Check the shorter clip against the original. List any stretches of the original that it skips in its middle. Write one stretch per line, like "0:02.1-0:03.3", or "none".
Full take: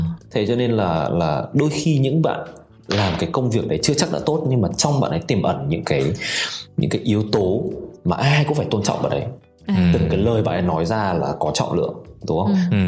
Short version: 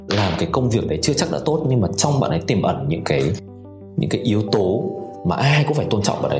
none